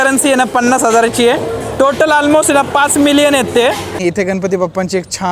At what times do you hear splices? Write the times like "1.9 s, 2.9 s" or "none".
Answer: 3.9 s